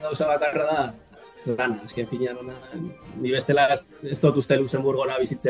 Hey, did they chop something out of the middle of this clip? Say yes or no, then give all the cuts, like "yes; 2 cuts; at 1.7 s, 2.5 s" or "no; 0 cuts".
no; 0 cuts